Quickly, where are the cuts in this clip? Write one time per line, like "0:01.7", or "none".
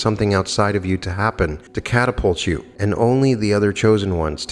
0:01.7
0:02.7